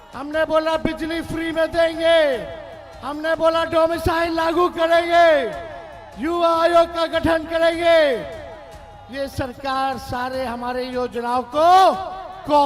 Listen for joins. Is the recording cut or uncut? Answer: uncut